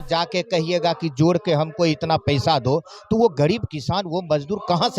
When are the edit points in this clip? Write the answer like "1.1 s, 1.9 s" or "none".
none